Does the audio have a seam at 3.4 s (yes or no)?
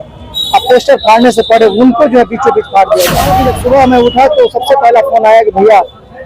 yes